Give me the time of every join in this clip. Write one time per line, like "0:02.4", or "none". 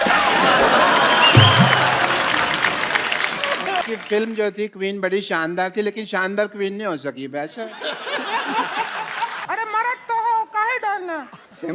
0:03.9
0:09.4